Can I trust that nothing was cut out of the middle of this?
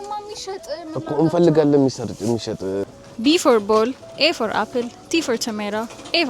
no; 1 cut; at 3.0 s

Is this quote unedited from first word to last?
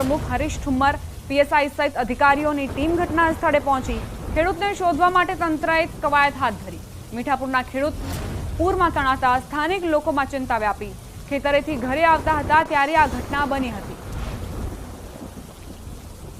yes; 0 cuts

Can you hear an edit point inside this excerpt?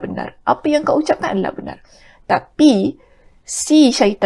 no; 0 cuts

